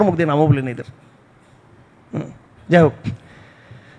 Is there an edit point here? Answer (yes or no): no